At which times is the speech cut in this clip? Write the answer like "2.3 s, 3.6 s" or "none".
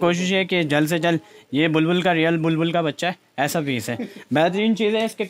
none